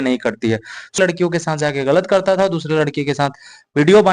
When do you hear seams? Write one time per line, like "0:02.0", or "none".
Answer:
0:01.0